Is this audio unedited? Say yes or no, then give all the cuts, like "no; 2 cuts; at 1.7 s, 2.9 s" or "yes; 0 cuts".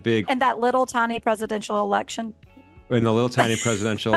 yes; 0 cuts